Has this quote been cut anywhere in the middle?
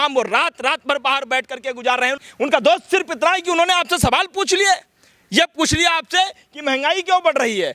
yes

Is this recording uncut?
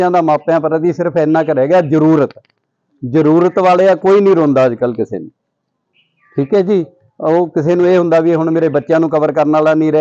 yes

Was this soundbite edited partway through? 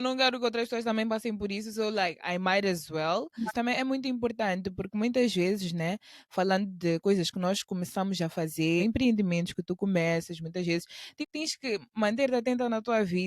yes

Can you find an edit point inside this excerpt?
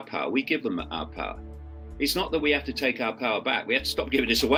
no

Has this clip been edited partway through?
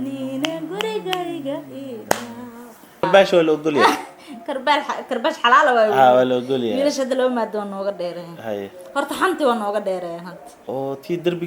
yes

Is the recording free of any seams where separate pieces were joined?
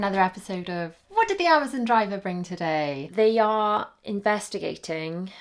no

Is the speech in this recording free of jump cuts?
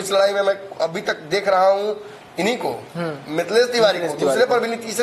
yes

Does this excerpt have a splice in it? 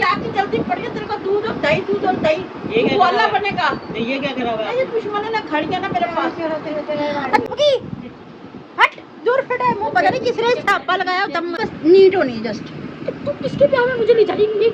yes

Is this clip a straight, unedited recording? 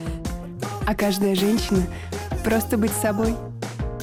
yes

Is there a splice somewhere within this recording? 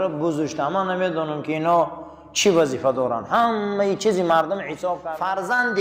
yes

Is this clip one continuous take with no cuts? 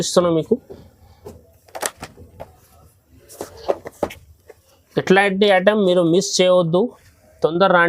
yes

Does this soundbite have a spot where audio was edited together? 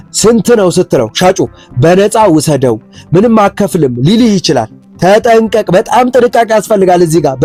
no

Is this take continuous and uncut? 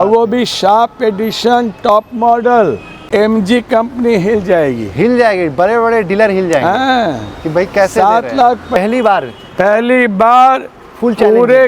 no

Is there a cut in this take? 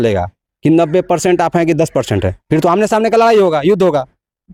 no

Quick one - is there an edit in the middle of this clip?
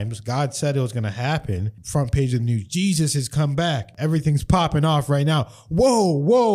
yes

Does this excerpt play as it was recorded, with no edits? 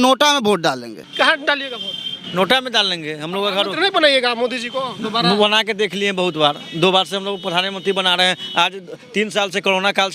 no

